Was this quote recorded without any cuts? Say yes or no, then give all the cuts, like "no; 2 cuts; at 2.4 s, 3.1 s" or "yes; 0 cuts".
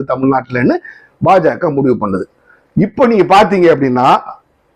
yes; 0 cuts